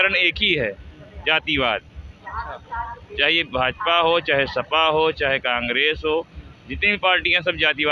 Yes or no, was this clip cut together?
no